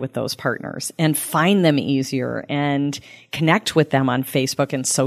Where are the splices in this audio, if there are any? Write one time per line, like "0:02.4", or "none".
none